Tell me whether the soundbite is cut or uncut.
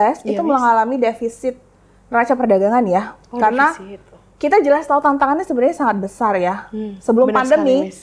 uncut